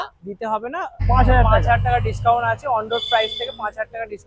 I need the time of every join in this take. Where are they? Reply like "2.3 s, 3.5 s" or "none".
1.0 s